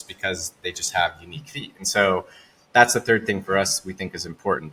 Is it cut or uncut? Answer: uncut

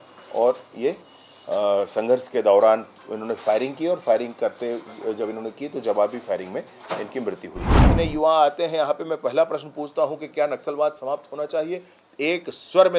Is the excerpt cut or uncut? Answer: cut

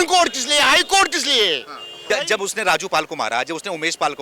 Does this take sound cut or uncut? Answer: cut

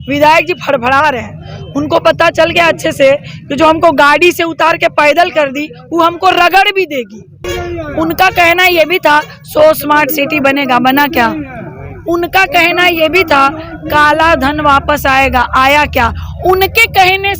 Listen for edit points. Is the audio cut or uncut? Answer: cut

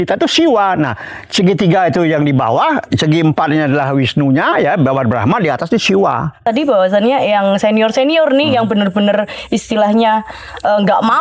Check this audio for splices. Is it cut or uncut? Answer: cut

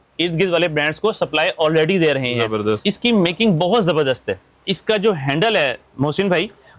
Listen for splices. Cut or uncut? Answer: cut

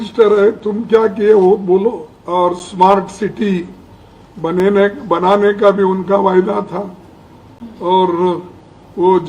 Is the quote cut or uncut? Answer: cut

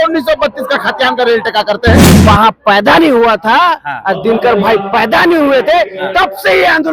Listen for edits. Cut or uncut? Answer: cut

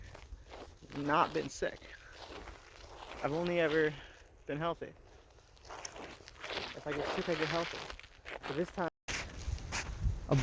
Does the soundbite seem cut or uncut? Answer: cut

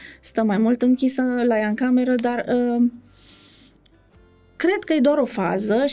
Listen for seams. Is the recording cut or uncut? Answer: uncut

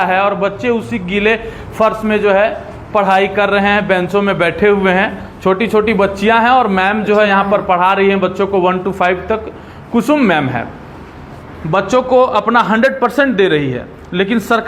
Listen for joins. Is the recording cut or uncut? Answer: uncut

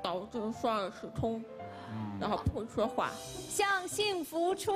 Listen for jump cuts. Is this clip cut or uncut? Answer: cut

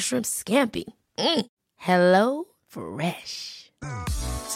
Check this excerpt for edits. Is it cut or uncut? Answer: uncut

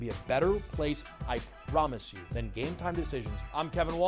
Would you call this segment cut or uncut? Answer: uncut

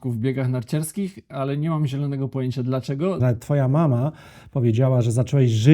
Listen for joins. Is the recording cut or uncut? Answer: cut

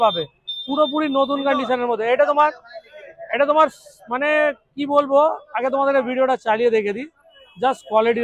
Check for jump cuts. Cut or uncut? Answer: uncut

